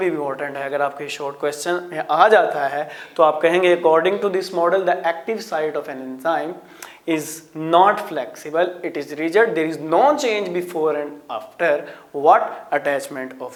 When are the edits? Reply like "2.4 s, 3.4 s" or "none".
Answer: none